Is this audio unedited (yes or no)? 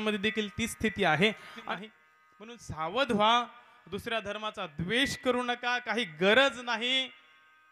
no